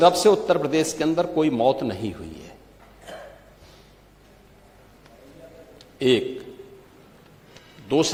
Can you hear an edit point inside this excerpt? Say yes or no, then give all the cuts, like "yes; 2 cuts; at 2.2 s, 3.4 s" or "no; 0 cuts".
no; 0 cuts